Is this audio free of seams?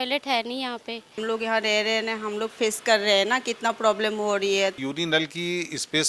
no; 2 cuts; at 1.2 s, 4.8 s

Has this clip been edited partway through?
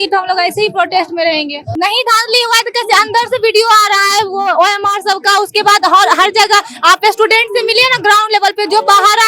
yes; 1 cut; at 1.6 s

